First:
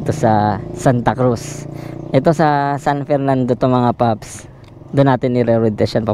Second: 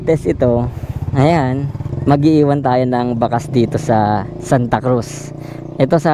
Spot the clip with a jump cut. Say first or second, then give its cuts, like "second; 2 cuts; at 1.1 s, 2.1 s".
second; 1 cut; at 1.8 s